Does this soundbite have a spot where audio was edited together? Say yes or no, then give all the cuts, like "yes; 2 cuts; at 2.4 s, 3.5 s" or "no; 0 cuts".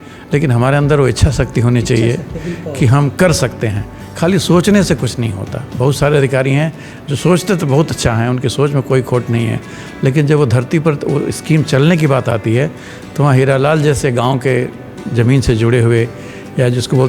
no; 0 cuts